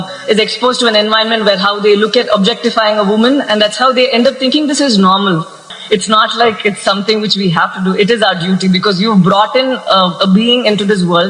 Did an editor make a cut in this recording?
yes; 1 cut; at 5.7 s

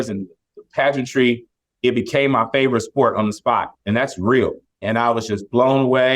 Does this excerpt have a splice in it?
yes; 1 cut; at 4.8 s

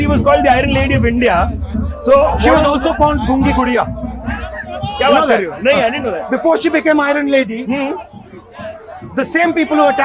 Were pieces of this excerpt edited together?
no; 0 cuts

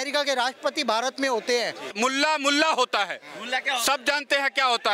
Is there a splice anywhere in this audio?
yes; 1 cut; at 1.9 s

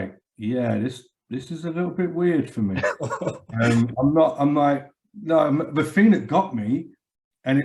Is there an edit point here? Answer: no; 0 cuts

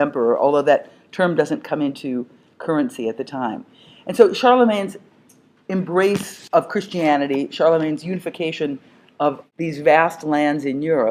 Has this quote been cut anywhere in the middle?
no; 0 cuts

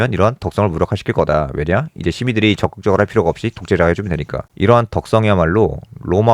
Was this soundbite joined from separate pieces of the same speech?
yes; 1 cut; at 4.5 s

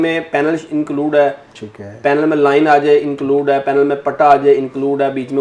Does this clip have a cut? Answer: no; 0 cuts

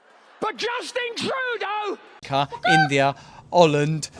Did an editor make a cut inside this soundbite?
yes; 1 cut; at 2.2 s

